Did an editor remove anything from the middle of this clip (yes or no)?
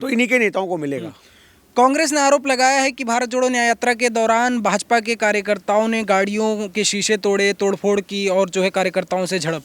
no